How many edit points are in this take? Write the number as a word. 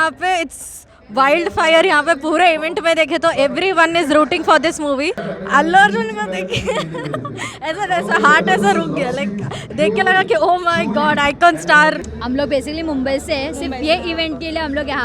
two